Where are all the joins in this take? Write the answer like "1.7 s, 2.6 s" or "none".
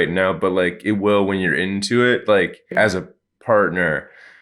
2.7 s